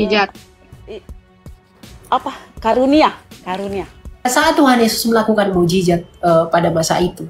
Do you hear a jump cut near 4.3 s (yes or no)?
yes